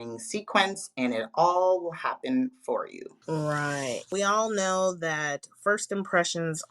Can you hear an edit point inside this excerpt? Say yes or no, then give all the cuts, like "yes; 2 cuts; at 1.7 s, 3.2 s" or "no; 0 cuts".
yes; 2 cuts; at 3.1 s, 4.0 s